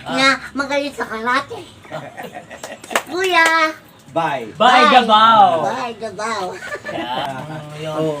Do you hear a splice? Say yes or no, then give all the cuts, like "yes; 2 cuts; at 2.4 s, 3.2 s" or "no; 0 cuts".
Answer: yes; 1 cut; at 7.3 s